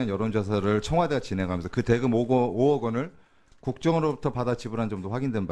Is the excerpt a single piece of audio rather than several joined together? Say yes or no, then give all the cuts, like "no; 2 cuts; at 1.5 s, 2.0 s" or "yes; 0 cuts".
yes; 0 cuts